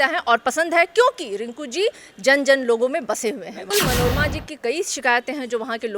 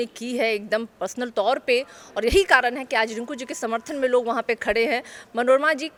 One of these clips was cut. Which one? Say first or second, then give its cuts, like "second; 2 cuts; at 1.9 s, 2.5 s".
first; 1 cut; at 3.7 s